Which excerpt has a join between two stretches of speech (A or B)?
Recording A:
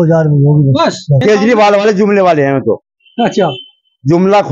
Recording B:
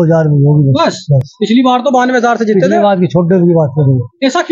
A